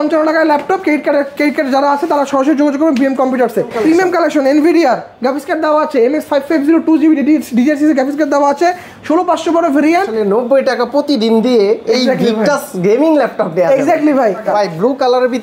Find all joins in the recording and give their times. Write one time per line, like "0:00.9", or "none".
0:03.7
0:10.1
0:14.4